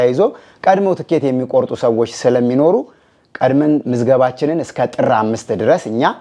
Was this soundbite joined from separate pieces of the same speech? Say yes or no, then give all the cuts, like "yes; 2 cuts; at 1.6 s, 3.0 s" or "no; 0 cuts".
no; 0 cuts